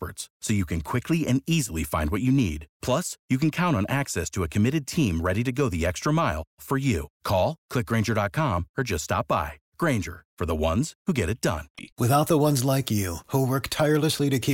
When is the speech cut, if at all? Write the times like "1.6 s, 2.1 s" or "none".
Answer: none

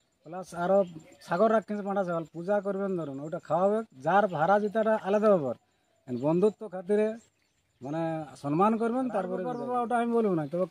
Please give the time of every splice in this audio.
9.5 s

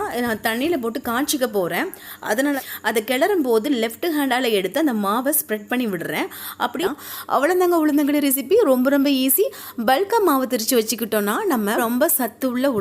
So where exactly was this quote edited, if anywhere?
2.6 s, 6.8 s, 11.8 s

